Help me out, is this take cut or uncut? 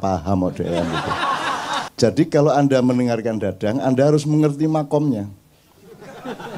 cut